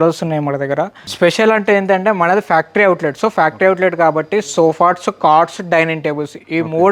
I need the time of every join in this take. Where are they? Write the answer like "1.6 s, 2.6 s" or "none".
1.0 s